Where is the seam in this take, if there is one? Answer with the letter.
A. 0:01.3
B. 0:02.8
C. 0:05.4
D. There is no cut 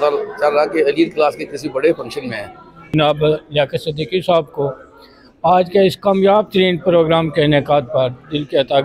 B